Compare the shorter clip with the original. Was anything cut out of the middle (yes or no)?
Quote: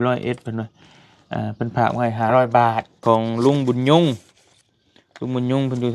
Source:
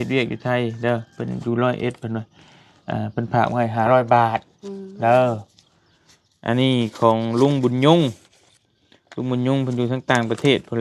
yes